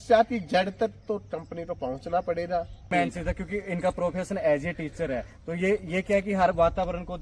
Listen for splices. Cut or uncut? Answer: cut